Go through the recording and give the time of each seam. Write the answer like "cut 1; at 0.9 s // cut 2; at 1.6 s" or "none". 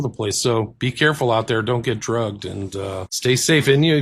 cut 1; at 3.1 s

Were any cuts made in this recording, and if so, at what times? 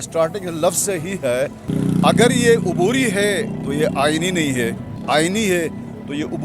cut 1; at 1.7 s // cut 2; at 4.9 s

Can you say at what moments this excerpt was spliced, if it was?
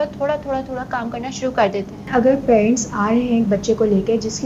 cut 1; at 2.1 s

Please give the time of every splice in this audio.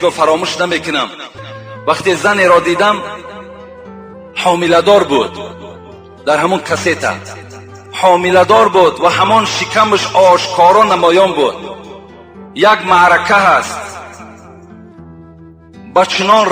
none

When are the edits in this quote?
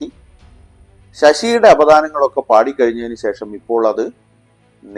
none

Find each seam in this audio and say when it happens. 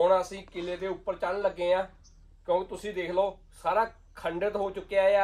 none

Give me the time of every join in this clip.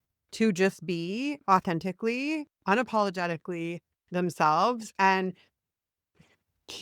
none

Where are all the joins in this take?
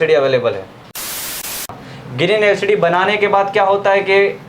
cut 1; at 1.4 s

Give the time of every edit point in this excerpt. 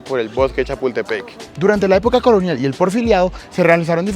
cut 1; at 1.5 s

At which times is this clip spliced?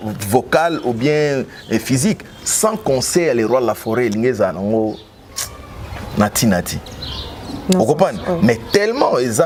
none

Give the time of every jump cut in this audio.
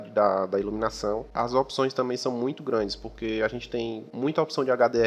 cut 1; at 1.3 s // cut 2; at 4.1 s

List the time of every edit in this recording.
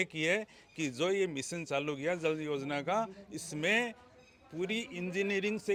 none

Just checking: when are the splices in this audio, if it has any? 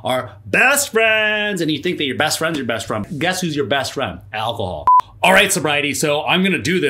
cut 1; at 3.1 s // cut 2; at 4.9 s

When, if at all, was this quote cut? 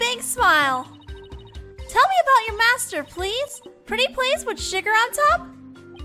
none

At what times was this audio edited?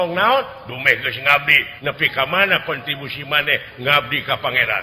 cut 1; at 1.6 s

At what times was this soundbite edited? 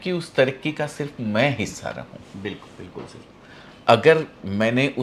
none

